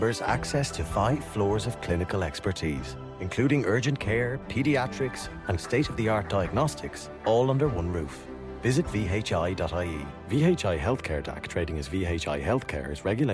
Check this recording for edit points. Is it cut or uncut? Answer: uncut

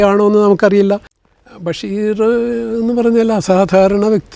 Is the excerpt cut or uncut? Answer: cut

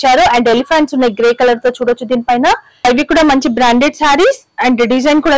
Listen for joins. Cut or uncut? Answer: cut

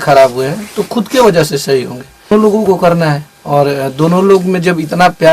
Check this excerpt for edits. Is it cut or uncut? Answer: cut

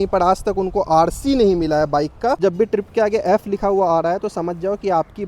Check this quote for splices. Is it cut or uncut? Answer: cut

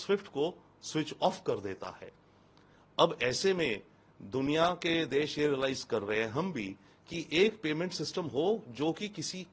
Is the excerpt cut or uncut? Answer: uncut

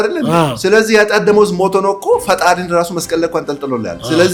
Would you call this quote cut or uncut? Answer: uncut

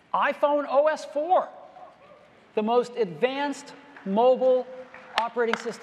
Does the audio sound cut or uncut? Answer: uncut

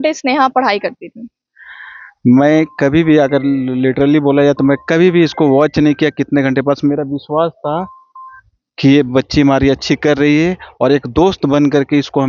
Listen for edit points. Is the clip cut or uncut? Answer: uncut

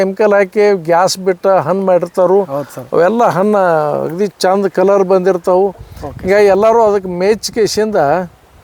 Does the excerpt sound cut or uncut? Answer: uncut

